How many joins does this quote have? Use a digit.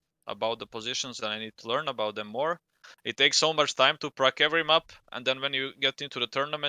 1